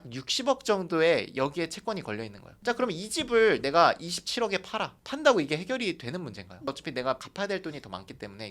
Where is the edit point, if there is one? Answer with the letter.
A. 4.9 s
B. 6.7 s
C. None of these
B